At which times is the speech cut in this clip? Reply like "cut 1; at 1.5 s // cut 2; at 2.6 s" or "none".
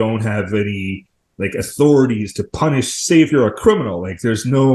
none